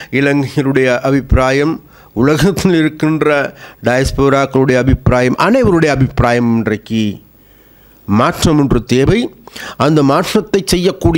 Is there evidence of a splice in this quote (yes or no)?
no